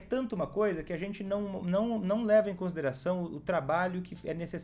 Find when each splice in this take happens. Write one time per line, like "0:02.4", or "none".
none